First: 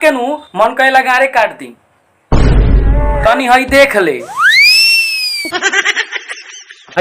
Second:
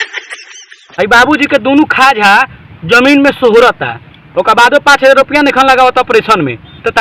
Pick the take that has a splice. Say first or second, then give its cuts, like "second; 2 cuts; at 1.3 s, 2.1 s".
first; 1 cut; at 3.1 s